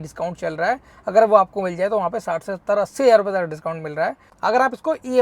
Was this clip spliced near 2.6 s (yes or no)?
no